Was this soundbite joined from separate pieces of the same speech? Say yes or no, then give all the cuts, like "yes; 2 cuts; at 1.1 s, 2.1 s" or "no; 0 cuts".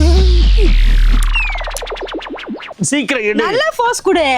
yes; 1 cut; at 2.7 s